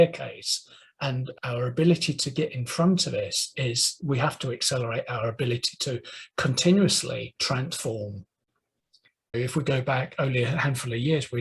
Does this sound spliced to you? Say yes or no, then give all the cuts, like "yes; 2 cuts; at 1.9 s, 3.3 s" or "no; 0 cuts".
yes; 1 cut; at 7.3 s